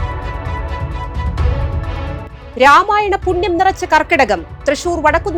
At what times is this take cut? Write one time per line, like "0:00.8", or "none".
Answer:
0:02.4